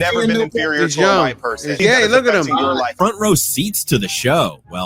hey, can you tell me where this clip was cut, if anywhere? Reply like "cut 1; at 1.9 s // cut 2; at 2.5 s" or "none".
cut 1; at 1.8 s // cut 2; at 2.9 s